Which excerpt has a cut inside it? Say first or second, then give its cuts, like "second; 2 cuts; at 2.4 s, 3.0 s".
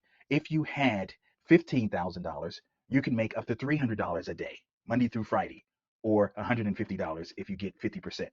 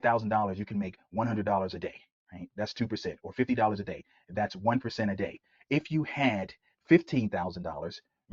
first; 1 cut; at 4.7 s